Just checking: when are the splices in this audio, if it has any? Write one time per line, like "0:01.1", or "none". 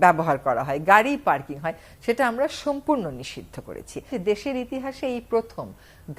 0:04.1